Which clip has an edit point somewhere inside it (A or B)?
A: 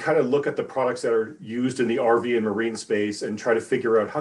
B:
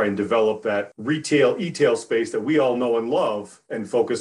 B